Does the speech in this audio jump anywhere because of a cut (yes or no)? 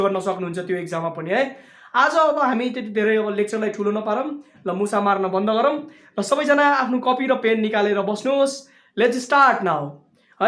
no